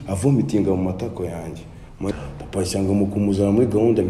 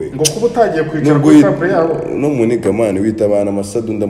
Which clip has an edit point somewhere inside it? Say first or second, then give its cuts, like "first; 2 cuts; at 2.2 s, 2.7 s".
first; 1 cut; at 2.1 s